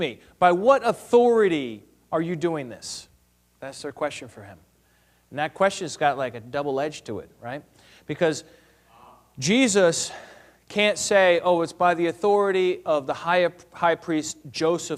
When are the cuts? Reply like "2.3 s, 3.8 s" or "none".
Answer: none